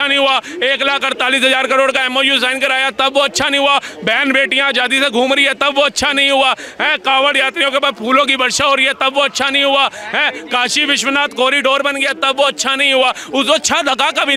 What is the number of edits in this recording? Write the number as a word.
zero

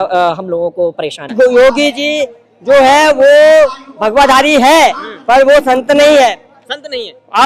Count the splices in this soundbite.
one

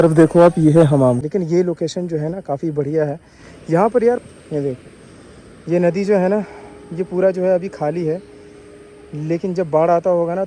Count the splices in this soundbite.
two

